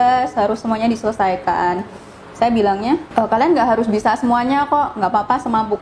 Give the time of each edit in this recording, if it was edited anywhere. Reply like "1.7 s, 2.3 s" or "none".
3.1 s